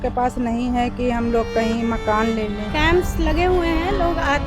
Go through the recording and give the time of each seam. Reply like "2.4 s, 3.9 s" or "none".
2.6 s

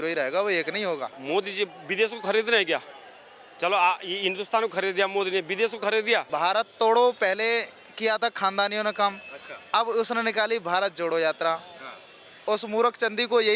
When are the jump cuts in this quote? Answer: 1.1 s, 6.3 s

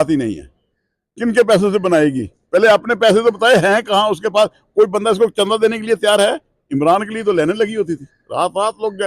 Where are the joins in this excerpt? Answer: none

